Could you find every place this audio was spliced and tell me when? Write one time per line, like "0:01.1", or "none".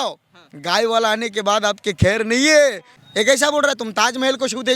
0:03.0